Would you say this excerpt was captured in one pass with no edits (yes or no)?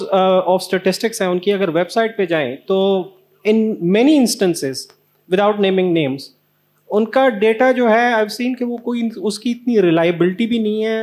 yes